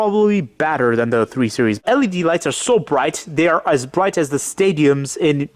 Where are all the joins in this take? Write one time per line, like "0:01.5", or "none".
0:01.8